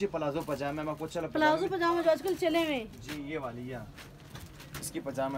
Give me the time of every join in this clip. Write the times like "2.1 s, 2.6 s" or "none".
none